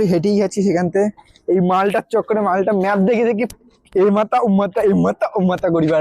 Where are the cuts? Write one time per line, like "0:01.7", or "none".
none